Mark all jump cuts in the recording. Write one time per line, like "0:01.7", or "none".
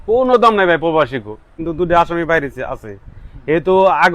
0:01.6